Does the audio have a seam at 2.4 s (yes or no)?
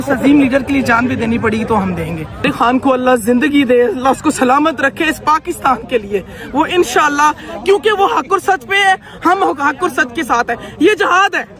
yes